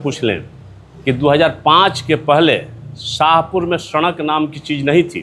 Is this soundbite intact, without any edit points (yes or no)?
yes